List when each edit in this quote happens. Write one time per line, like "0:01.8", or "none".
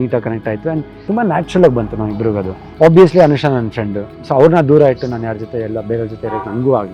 0:00.9
0:02.6